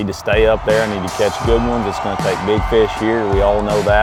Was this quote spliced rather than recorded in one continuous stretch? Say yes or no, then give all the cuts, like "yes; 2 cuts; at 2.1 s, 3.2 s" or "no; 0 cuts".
no; 0 cuts